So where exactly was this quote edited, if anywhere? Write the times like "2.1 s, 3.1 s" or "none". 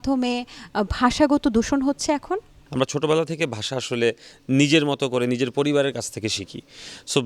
none